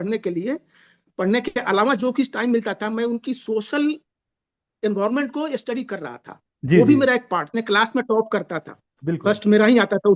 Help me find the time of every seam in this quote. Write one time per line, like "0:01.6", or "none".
0:07.6